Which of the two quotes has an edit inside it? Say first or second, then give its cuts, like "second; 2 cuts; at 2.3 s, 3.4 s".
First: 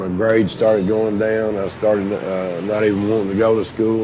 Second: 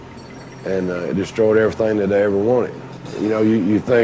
second; 1 cut; at 3.1 s